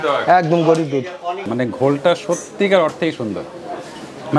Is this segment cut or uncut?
cut